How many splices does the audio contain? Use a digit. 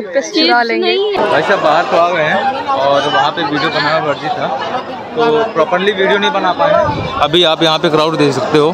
1